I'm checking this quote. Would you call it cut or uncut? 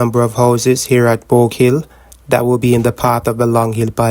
uncut